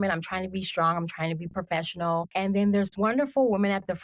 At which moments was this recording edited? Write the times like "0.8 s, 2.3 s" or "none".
2.3 s